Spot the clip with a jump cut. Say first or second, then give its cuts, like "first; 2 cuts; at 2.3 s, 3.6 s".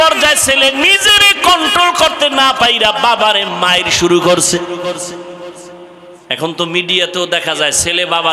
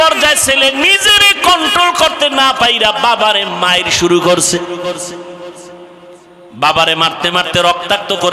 second; 1 cut; at 6.2 s